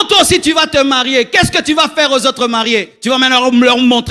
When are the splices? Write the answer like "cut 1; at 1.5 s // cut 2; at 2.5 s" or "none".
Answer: cut 1; at 2.9 s